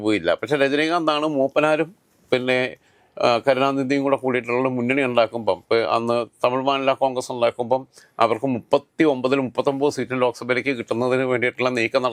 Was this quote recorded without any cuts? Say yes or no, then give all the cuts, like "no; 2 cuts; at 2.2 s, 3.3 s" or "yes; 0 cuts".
yes; 0 cuts